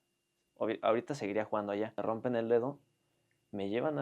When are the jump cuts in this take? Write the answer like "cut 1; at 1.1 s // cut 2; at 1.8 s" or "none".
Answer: cut 1; at 2.0 s